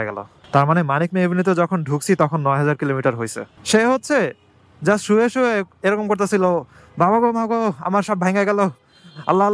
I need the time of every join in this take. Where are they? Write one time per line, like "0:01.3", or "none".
0:03.5